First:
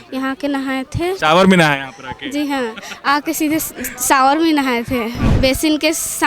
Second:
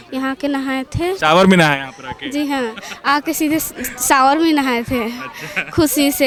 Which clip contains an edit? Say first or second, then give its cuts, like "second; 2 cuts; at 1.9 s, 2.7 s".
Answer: first; 1 cut; at 5.2 s